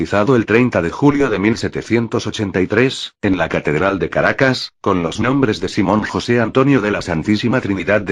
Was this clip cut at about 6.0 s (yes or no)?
no